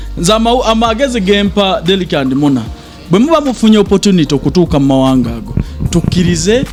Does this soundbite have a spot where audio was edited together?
no; 0 cuts

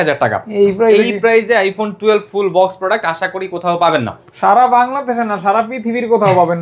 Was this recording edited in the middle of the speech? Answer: no; 0 cuts

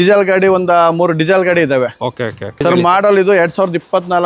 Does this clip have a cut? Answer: yes; 1 cut; at 2.6 s

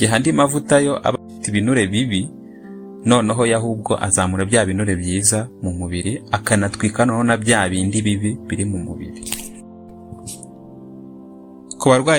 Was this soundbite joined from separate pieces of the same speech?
no; 0 cuts

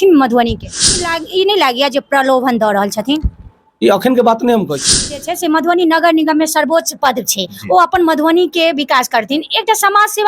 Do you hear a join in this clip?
yes; 2 cuts; at 1.1 s, 5.1 s

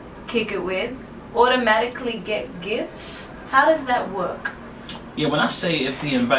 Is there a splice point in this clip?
yes; 1 cut; at 4.1 s

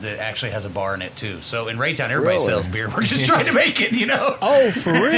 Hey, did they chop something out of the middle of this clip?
no; 0 cuts

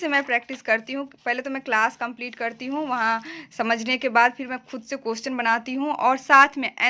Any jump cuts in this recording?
no; 0 cuts

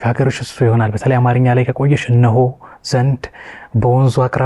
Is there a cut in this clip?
no; 0 cuts

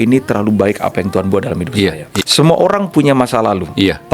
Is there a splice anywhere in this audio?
yes; 1 cut; at 2.1 s

